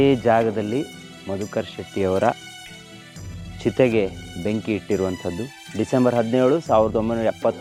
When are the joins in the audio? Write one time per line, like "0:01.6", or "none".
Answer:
none